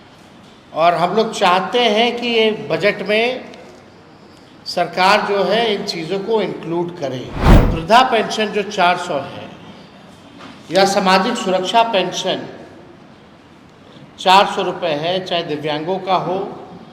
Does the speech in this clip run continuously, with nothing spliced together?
no; 1 cut; at 7.6 s

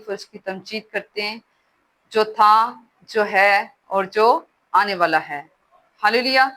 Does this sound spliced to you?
no; 0 cuts

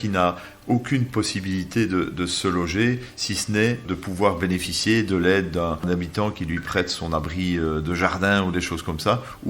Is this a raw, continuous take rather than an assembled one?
no; 2 cuts; at 3.8 s, 5.8 s

